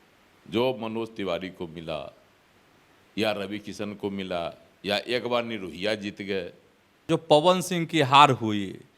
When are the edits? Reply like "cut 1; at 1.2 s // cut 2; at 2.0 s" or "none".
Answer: cut 1; at 7.0 s

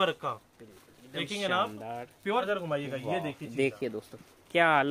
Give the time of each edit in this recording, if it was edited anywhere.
cut 1; at 2.4 s

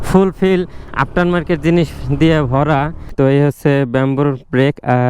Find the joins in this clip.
cut 1; at 3.0 s

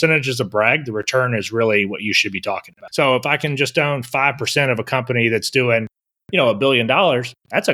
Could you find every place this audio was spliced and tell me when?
none

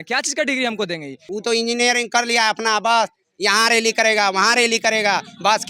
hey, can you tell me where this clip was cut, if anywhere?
cut 1; at 1.2 s

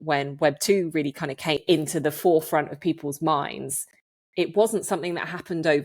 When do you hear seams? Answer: cut 1; at 1.6 s

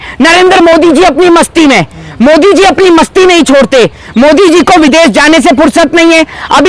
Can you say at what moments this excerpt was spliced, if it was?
none

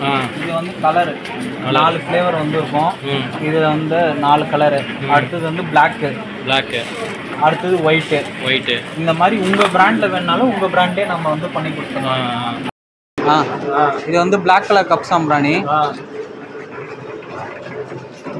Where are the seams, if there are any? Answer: cut 1; at 12.7 s

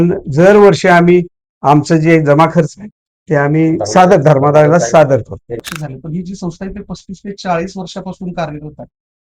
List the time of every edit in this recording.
cut 1; at 5.6 s

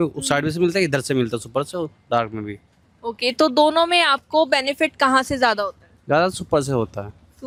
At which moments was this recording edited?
none

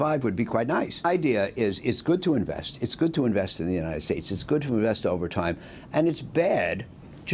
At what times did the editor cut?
cut 1; at 1.0 s

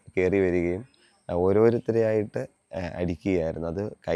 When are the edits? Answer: none

